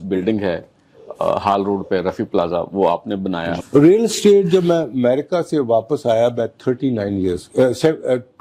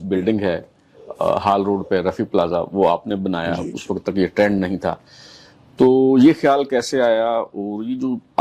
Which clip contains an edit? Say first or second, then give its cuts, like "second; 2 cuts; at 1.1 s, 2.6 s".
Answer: first; 1 cut; at 3.6 s